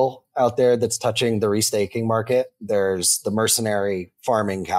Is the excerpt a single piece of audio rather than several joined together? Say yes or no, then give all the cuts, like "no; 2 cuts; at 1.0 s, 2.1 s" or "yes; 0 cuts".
yes; 0 cuts